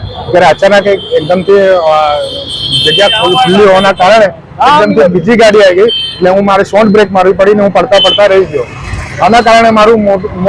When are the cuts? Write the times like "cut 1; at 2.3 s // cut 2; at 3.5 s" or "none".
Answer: none